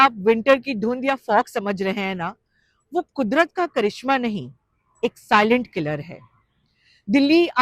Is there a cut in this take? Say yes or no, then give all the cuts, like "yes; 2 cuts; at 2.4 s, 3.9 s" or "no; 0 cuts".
no; 0 cuts